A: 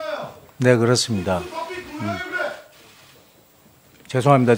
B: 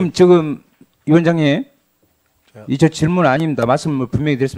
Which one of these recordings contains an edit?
A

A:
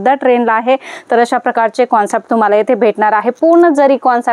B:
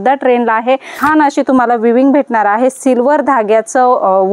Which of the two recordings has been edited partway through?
B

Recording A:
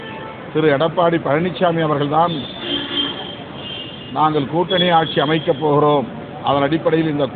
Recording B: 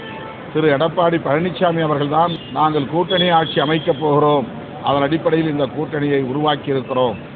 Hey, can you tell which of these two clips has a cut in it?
B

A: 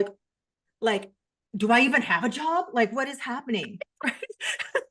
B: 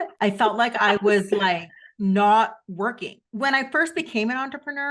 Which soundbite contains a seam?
B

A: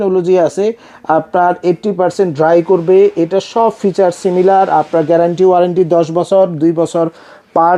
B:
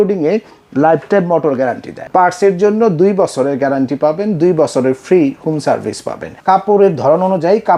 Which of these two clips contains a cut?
B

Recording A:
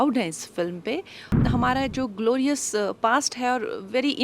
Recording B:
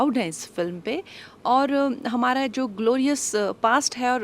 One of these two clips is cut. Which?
A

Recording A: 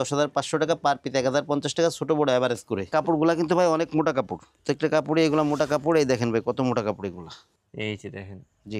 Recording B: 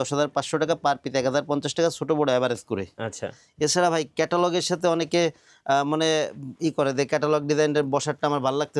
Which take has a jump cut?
A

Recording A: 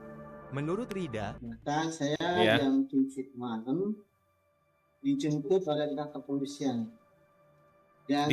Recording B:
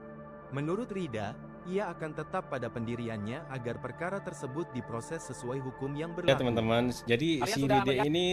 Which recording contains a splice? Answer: A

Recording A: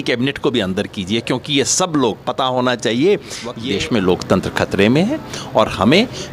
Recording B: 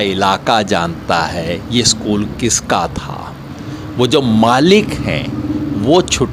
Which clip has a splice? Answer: A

